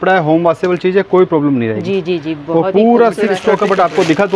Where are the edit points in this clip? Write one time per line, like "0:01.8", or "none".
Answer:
0:03.4